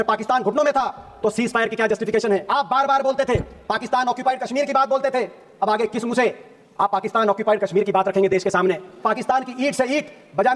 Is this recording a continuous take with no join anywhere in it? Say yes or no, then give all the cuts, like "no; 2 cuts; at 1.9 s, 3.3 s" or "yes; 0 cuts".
no; 2 cuts; at 2.5 s, 9.0 s